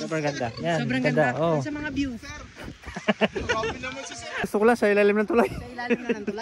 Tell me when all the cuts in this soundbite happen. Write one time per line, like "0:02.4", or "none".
0:04.5